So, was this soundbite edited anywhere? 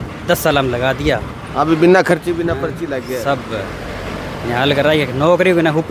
no; 0 cuts

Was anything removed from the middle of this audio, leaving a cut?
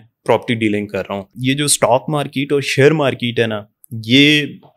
yes; 1 cut; at 1.3 s

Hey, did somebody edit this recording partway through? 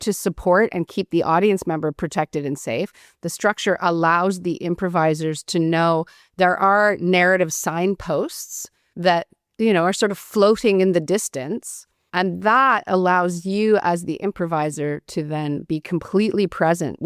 no; 0 cuts

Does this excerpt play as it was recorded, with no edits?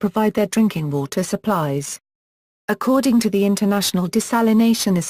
no; 1 cut; at 4.0 s

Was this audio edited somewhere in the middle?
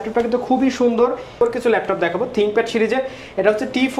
yes; 1 cut; at 1.4 s

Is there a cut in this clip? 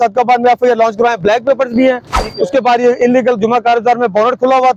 no; 0 cuts

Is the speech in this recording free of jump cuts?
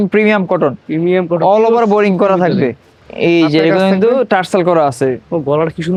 yes; 0 cuts

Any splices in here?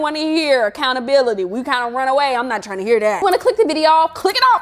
no; 0 cuts

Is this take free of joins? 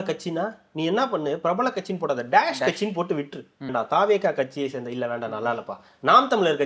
no; 1 cut; at 3.7 s

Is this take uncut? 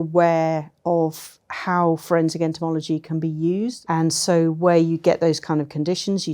no; 1 cut; at 3.8 s

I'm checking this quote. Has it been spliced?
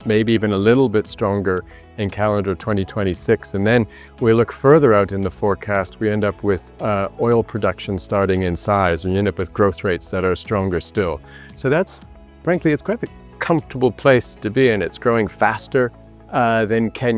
no; 0 cuts

